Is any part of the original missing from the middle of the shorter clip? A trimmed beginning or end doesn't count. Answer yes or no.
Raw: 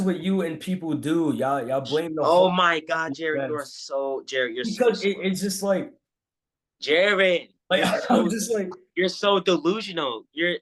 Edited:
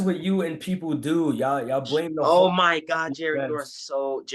no